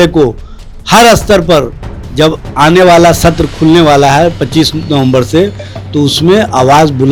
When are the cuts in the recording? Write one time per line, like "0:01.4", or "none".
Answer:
none